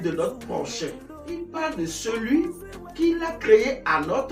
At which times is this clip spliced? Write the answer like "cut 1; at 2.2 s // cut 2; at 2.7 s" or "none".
cut 1; at 1.4 s